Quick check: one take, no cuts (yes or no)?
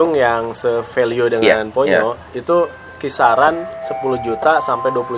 yes